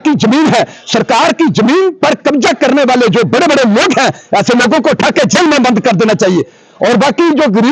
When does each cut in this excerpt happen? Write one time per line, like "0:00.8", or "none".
none